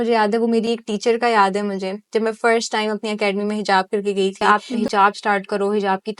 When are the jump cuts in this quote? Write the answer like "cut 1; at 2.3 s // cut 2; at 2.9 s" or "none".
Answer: cut 1; at 4.4 s